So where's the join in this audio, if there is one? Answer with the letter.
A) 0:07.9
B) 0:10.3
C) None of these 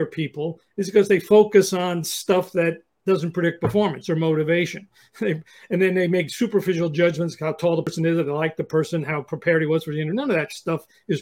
A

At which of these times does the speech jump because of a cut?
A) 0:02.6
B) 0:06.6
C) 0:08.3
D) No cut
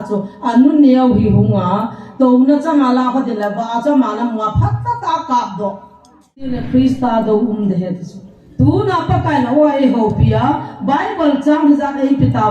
B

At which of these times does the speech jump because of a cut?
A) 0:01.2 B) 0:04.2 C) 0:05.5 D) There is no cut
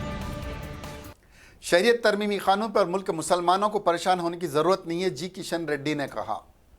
A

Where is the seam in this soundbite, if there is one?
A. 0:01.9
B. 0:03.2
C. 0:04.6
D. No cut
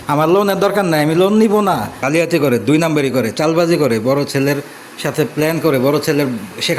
A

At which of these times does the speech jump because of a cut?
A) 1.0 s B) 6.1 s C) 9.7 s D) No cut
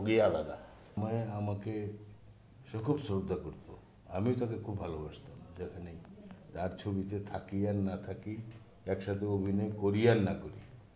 A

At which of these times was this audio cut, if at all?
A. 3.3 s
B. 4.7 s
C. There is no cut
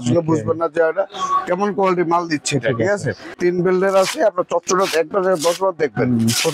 A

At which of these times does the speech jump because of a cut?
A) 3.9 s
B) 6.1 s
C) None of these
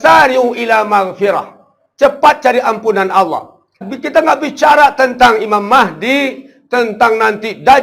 A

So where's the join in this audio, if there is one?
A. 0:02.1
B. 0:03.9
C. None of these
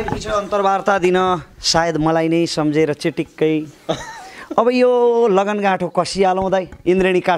C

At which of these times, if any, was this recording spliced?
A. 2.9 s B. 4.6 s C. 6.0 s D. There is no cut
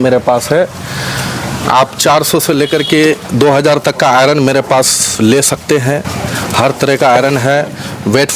D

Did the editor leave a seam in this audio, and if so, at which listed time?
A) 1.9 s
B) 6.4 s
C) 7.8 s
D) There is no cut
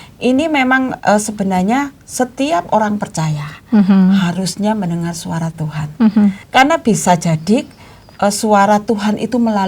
B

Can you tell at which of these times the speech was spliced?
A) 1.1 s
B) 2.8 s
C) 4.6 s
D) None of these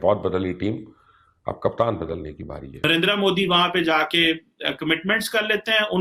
B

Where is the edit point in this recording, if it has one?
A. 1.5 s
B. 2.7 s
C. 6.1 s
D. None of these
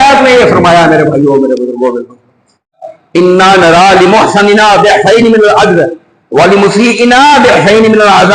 B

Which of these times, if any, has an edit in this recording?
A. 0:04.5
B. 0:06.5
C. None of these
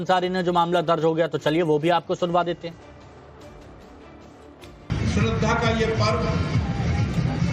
B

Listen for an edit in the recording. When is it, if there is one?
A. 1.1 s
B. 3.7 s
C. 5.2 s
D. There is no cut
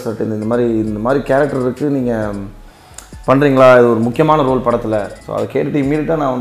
C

